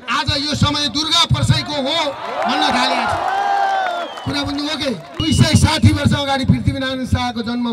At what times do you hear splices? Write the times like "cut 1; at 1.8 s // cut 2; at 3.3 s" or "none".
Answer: cut 1; at 5.2 s